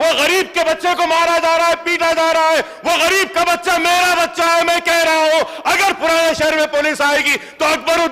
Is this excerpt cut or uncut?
uncut